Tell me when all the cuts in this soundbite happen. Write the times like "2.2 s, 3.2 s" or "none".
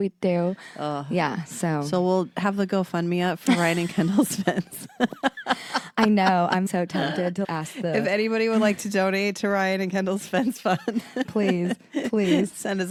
none

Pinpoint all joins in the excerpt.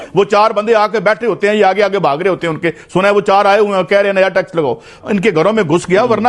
5.0 s

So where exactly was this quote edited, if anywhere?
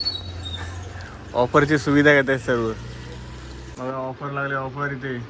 3.6 s

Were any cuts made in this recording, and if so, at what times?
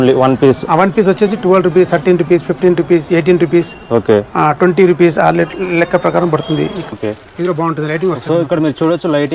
6.9 s

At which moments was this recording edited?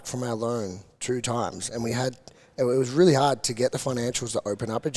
none

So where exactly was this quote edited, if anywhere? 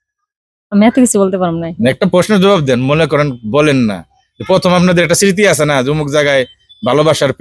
none

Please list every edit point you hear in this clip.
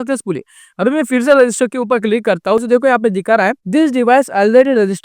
2.6 s, 3.6 s

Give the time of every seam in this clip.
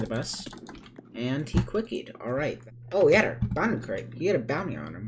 2.6 s

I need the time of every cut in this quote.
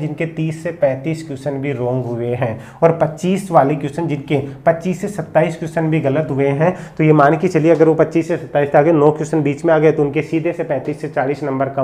none

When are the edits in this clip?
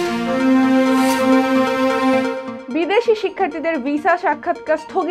2.5 s

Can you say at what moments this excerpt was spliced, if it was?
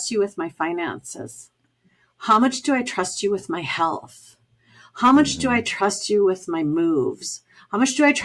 none

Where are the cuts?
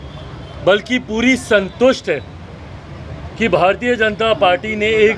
none

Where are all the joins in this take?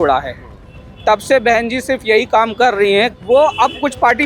3.1 s

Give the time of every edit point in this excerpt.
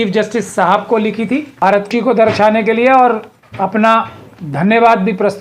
1.9 s

